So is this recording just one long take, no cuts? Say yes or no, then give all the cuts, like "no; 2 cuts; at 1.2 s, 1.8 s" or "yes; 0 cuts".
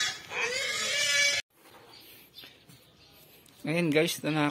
no; 1 cut; at 1.4 s